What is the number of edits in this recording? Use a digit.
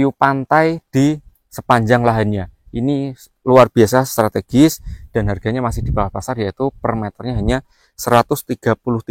0